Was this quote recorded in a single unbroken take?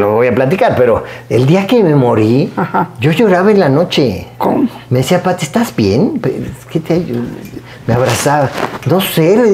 yes; 0 cuts

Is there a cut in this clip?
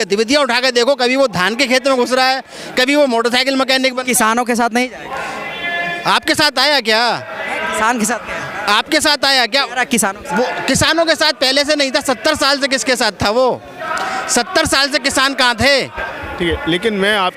yes; 1 cut; at 16.1 s

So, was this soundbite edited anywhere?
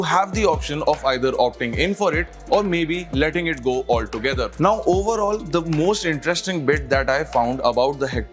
no; 0 cuts

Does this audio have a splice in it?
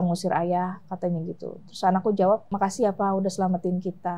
yes; 1 cut; at 2.5 s

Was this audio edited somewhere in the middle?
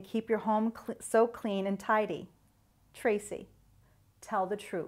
no; 0 cuts

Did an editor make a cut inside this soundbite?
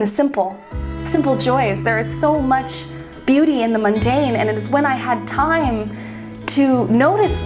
no; 0 cuts

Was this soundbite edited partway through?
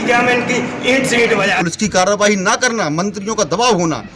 yes; 1 cut; at 1.6 s

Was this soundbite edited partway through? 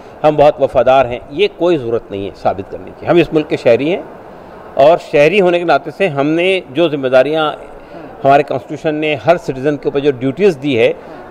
no; 0 cuts

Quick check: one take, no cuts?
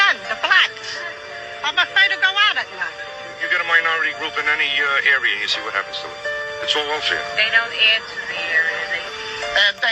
yes; 0 cuts

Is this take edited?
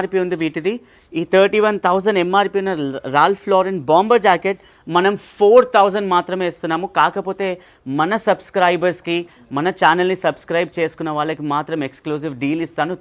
no; 0 cuts

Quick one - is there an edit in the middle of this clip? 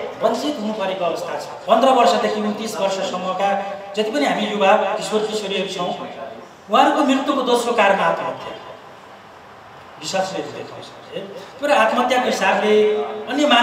yes; 1 cut; at 1.5 s

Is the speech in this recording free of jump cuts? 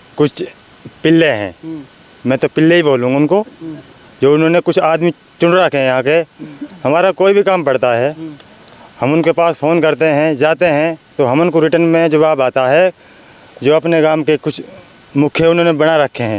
yes; 0 cuts

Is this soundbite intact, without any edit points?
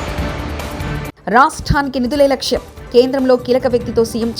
yes; 0 cuts

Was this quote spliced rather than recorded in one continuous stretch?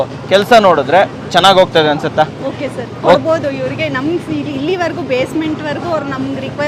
no; 0 cuts

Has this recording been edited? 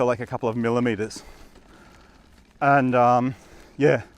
no; 0 cuts

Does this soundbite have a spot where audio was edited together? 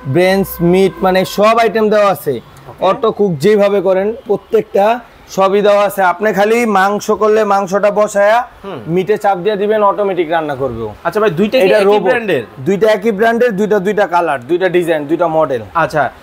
no; 0 cuts

